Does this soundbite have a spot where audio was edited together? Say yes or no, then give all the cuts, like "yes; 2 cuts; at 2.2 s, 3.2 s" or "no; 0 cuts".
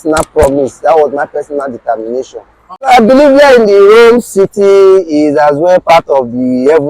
yes; 1 cut; at 2.9 s